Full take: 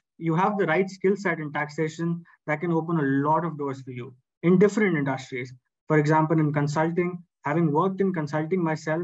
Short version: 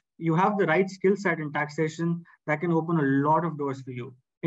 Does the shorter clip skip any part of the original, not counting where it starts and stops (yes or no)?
no